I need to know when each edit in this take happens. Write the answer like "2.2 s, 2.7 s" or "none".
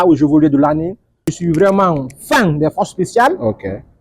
1.4 s